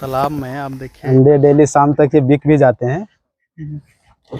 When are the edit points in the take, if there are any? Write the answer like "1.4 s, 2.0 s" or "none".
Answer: 1.0 s